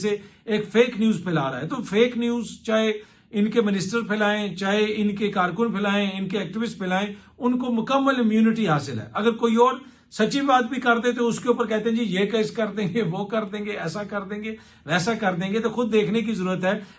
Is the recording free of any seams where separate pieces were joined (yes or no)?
yes